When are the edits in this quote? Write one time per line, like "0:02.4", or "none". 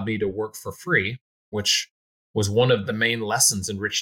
0:02.9

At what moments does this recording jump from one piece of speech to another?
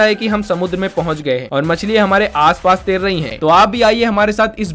0:03.3

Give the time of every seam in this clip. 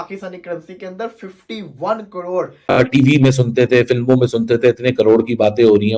0:02.8

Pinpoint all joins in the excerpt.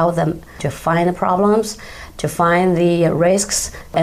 none

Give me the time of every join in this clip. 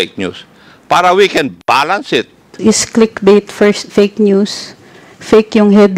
0:02.5

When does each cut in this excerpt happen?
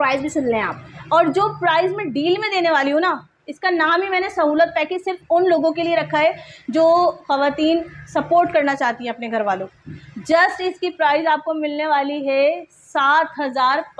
none

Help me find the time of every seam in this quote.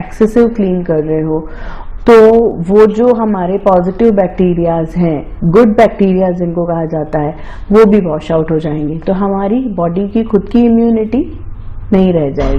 none

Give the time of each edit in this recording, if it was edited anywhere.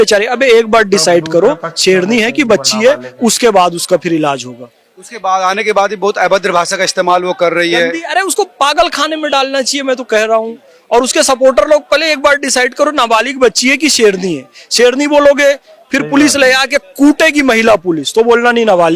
none

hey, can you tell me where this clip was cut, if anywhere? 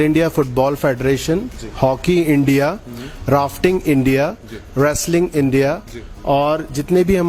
none

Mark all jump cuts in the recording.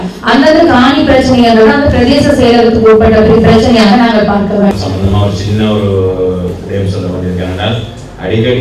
0:04.7

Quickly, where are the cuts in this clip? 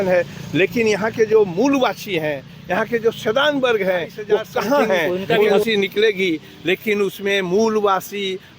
0:05.6

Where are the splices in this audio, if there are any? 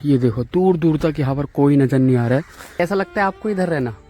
0:02.8

